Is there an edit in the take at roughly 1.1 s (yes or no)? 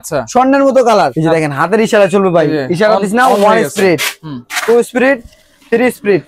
yes